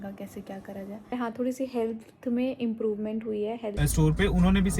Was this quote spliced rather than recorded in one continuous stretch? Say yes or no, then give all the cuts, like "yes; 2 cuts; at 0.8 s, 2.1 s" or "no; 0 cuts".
yes; 2 cuts; at 1.1 s, 3.8 s